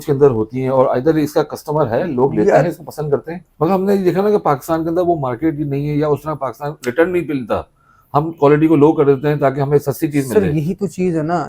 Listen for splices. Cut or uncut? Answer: cut